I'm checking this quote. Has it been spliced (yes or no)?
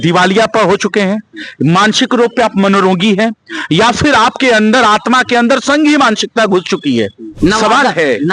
yes